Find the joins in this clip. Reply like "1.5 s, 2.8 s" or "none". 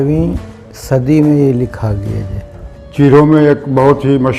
2.9 s